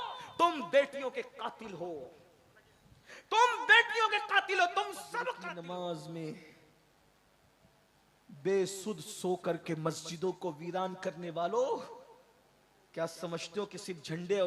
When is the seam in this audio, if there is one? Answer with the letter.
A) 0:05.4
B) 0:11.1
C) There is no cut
A